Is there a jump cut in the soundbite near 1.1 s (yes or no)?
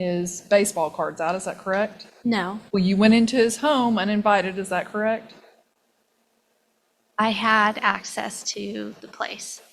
no